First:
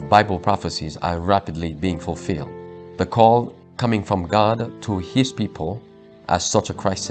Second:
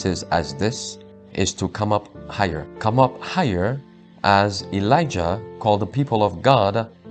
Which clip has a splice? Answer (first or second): second